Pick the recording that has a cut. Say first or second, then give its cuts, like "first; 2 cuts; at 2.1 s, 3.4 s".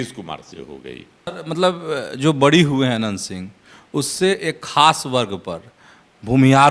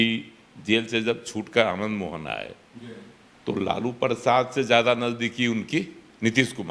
first; 1 cut; at 1.3 s